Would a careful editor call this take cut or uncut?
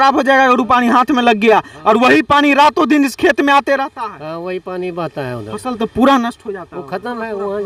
uncut